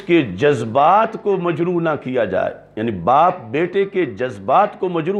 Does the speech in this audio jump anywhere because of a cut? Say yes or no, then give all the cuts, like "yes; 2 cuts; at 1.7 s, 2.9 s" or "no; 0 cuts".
no; 0 cuts